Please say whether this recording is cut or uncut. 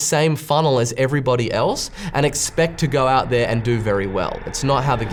uncut